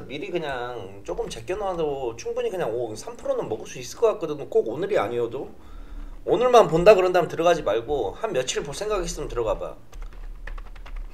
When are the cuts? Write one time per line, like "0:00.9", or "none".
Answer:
0:10.1